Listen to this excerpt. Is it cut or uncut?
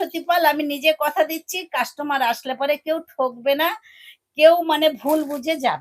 uncut